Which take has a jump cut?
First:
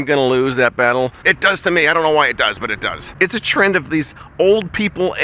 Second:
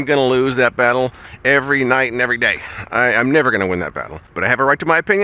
first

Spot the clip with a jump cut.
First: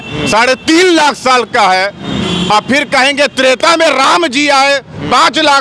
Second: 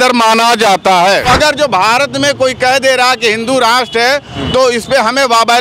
second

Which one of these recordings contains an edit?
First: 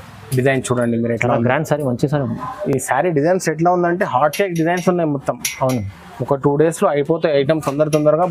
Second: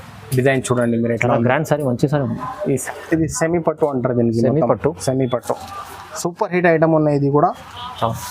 second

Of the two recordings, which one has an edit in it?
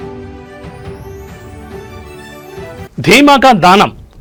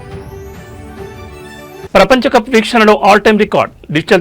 second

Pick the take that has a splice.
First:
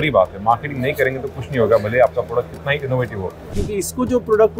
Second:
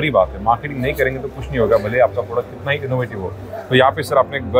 first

